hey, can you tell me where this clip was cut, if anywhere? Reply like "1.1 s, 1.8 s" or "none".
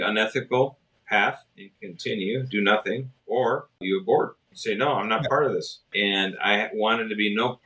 3.8 s, 4.5 s, 5.8 s